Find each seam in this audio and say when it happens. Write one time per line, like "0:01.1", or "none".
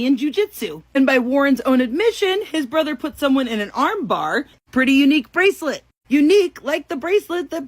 0:04.6